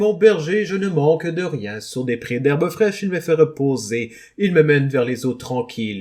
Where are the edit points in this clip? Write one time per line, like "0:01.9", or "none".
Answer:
none